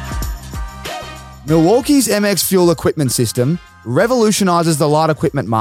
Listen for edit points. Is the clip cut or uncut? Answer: cut